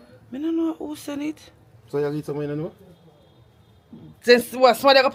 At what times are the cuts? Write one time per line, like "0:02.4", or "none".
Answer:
none